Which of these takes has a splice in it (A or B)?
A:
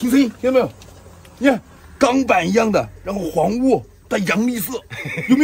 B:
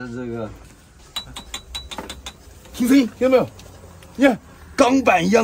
B